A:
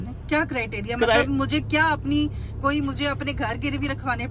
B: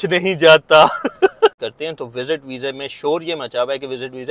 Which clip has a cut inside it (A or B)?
B